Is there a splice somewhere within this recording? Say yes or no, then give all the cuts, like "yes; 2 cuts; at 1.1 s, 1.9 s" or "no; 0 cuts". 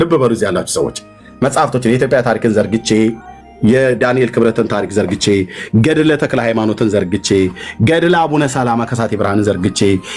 no; 0 cuts